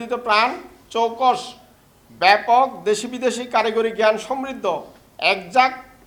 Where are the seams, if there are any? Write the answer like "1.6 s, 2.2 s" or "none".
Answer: none